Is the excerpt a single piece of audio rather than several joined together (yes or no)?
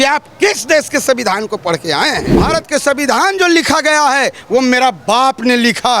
no